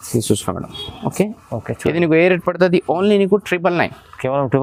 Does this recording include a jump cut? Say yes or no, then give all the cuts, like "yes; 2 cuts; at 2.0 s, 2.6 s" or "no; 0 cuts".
no; 0 cuts